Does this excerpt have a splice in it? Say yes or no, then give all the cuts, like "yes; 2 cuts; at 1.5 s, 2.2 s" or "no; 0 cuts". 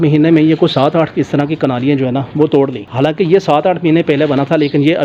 no; 0 cuts